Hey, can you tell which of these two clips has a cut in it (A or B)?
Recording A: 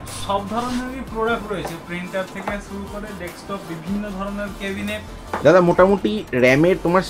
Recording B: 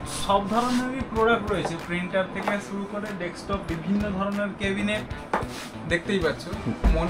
A